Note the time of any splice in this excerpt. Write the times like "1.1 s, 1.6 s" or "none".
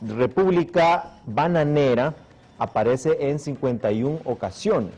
none